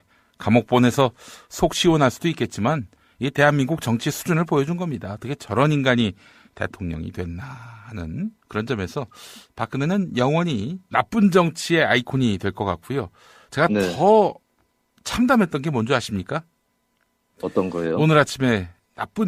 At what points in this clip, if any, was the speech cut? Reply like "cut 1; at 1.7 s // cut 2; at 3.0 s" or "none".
none